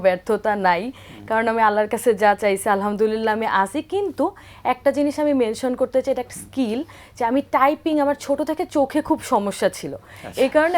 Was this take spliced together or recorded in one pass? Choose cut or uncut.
uncut